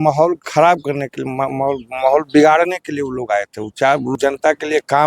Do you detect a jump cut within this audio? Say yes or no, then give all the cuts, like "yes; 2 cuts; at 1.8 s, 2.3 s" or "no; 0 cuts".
yes; 1 cut; at 4.1 s